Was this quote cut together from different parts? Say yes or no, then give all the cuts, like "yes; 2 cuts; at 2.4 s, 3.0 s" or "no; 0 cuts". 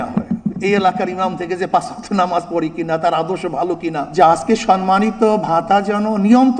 yes; 1 cut; at 4.0 s